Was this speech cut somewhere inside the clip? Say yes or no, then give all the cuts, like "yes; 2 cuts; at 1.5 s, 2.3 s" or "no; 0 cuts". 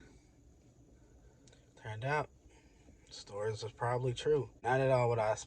yes; 1 cut; at 4.5 s